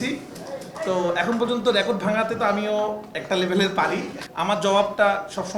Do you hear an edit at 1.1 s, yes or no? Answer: no